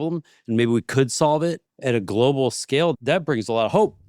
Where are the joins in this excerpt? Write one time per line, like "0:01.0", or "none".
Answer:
0:01.7
0:03.0

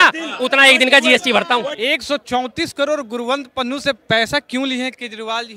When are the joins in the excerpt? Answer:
0:01.7

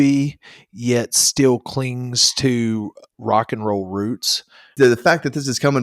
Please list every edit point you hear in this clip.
0:04.7

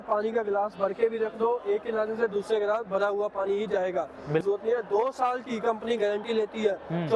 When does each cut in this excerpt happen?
0:04.4

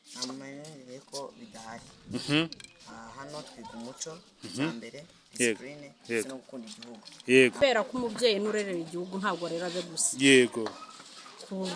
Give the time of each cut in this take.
0:07.5

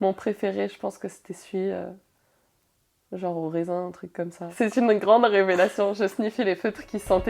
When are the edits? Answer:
0:04.4

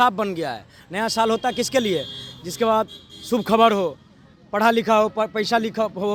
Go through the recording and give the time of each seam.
none

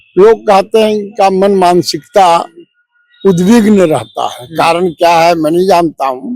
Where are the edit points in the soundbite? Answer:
none

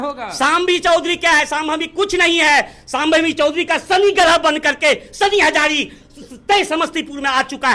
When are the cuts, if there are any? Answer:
none

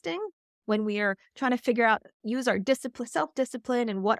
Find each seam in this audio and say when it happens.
none

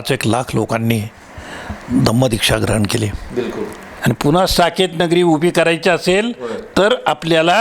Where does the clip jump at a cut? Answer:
0:03.8

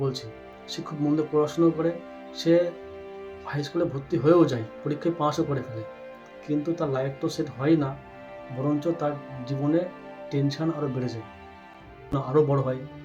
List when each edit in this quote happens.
0:12.1

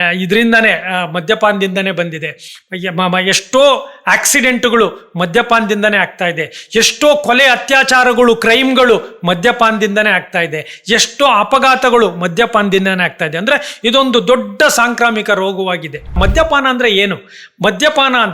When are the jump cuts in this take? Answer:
0:16.2

